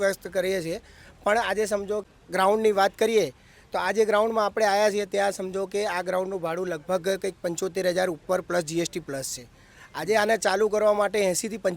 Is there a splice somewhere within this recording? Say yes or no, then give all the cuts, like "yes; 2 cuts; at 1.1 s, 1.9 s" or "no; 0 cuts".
yes; 1 cut; at 2.1 s